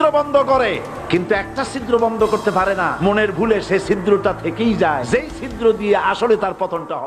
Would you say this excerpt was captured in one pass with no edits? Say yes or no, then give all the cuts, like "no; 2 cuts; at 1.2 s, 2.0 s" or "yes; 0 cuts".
no; 3 cuts; at 0.9 s, 2.9 s, 5.0 s